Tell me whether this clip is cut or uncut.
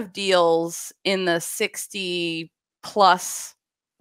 uncut